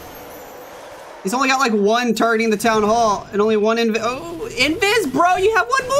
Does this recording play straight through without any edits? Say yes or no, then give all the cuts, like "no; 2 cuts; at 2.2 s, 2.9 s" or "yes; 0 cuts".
yes; 0 cuts